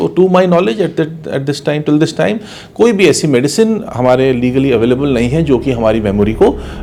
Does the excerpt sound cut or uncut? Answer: uncut